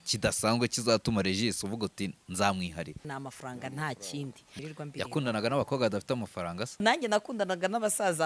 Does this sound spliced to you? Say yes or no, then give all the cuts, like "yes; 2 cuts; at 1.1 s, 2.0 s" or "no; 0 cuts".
yes; 3 cuts; at 3.1 s, 4.6 s, 6.8 s